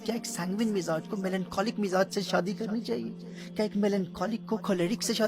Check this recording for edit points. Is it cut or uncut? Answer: uncut